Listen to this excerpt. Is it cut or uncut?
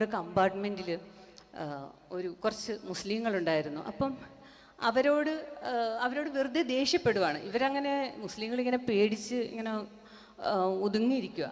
uncut